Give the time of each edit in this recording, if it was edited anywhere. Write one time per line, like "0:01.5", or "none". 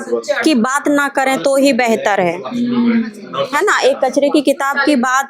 none